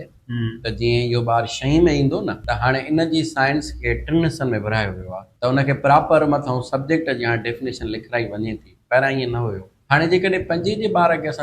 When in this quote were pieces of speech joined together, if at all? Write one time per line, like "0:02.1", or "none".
0:02.4
0:05.2
0:09.7